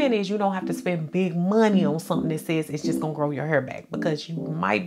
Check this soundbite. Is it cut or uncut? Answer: uncut